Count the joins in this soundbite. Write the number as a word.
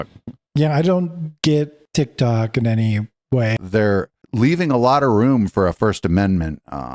one